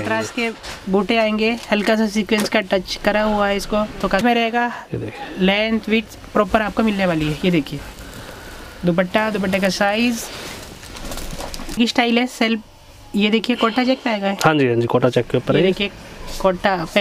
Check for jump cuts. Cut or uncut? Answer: cut